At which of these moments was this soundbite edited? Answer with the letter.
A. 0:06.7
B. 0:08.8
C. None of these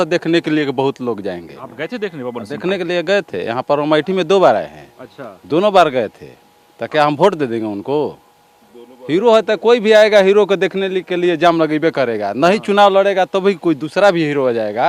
C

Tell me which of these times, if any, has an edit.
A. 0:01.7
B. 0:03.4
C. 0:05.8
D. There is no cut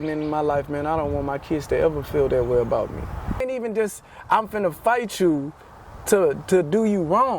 B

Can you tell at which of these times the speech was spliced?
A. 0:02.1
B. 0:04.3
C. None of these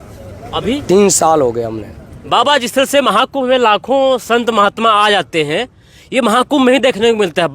A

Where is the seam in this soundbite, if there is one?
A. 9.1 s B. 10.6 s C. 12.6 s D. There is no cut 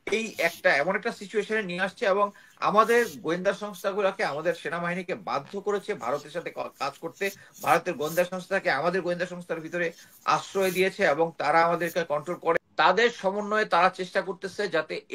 C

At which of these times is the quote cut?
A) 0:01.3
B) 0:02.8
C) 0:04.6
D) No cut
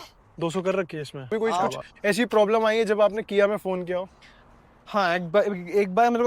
A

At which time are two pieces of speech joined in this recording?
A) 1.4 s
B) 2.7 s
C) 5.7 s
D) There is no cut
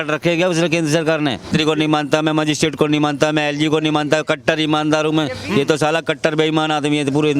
A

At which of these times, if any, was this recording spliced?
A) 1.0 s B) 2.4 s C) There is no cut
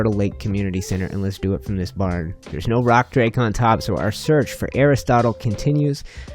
C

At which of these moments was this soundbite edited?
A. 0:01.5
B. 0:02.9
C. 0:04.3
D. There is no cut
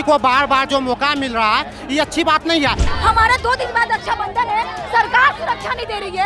B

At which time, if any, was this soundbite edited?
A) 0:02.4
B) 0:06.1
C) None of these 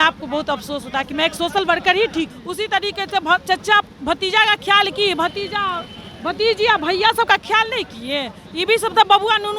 A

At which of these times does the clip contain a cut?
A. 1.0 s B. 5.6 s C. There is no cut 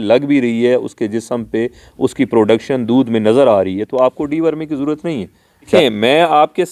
B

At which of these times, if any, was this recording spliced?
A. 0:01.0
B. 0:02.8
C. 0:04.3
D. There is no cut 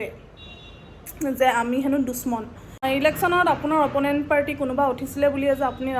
B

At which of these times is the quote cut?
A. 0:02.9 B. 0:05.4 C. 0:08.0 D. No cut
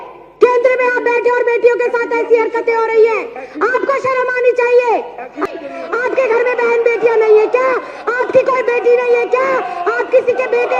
B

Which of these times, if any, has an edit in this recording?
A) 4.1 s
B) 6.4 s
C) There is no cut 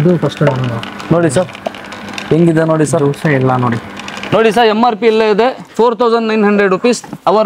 A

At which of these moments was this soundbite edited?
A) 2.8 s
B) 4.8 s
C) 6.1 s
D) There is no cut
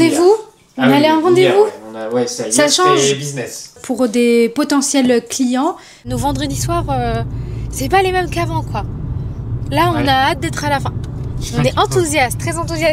C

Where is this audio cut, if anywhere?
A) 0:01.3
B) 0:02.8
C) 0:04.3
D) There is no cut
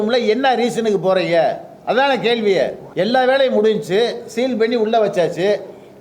B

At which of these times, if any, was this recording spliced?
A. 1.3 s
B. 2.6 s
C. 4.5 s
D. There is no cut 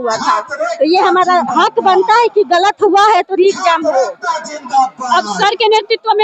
D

